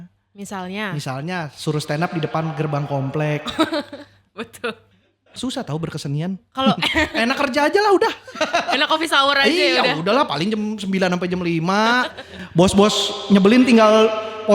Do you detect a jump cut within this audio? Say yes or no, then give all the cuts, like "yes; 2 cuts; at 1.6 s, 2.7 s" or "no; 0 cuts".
yes; 1 cut; at 5.3 s